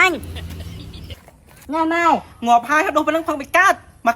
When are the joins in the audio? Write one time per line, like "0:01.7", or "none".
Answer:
0:01.2